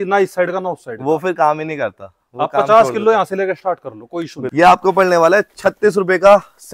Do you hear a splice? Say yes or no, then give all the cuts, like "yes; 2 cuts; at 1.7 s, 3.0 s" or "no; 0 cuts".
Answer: yes; 1 cut; at 4.4 s